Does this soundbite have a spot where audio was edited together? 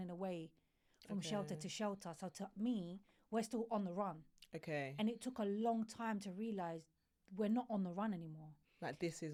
no; 0 cuts

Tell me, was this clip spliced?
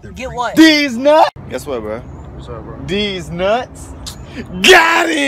yes; 1 cut; at 1.3 s

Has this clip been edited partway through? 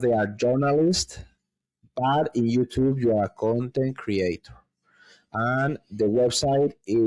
no; 0 cuts

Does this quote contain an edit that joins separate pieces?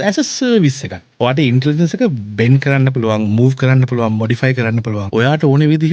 yes; 2 cuts; at 1.1 s, 5.0 s

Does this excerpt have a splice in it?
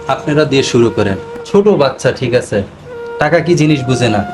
yes; 1 cut; at 1.3 s

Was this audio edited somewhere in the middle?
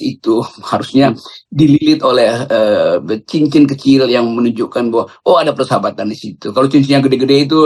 no; 0 cuts

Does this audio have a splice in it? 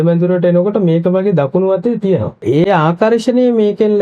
yes; 1 cut; at 2.4 s

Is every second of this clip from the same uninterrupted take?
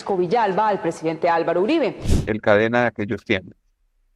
no; 1 cut; at 2.1 s

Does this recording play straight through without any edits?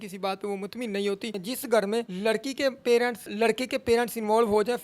no; 3 cuts; at 1.4 s, 2.1 s, 3.3 s

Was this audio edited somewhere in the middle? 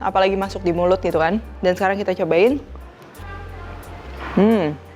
yes; 1 cut; at 1.5 s

